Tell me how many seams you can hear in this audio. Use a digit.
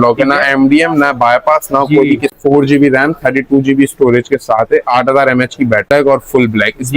2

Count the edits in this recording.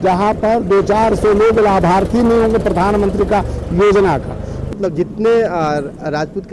1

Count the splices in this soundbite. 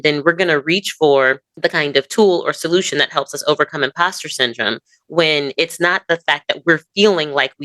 1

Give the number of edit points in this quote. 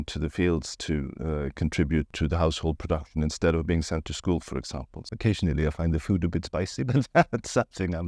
2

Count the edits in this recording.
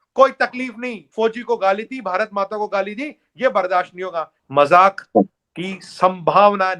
2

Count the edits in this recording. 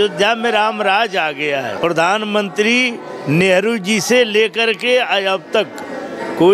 1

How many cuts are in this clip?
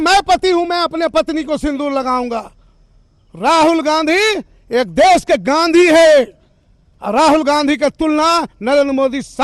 0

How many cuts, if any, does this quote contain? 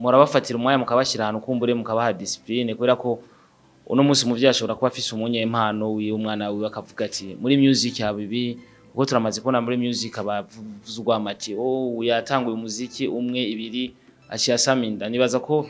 0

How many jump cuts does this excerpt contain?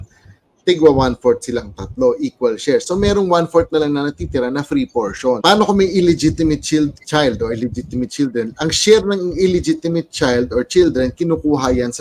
1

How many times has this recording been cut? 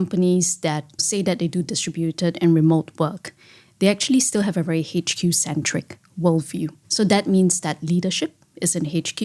2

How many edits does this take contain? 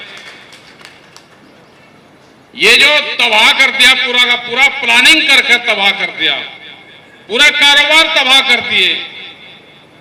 0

